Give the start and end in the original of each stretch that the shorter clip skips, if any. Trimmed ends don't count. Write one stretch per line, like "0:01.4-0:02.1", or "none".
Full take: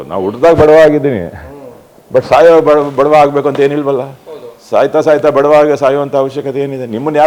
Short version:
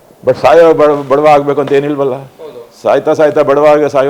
none